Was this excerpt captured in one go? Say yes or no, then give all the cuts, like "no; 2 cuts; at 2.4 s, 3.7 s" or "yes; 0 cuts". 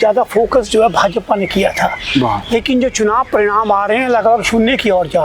yes; 0 cuts